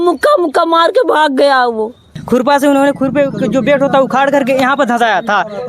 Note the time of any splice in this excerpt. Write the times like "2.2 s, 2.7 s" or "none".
2.1 s